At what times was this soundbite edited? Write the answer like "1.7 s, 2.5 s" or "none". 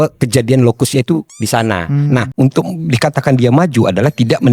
2.3 s